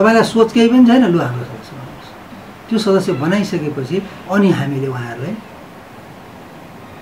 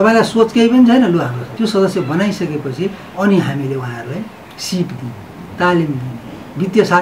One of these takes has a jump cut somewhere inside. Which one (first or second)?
second